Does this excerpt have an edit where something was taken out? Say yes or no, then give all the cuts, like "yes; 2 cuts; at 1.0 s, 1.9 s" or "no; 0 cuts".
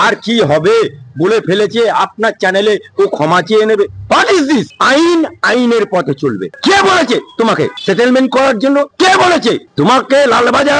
no; 0 cuts